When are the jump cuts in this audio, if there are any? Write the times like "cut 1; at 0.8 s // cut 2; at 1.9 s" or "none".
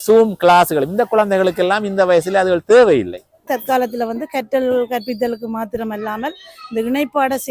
cut 1; at 3.5 s